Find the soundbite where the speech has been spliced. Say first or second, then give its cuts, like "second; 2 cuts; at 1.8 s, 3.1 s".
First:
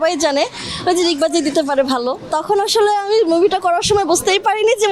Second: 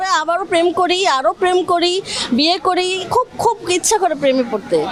first; 1 cut; at 2.3 s